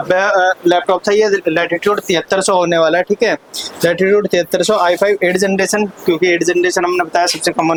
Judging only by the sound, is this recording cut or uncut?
uncut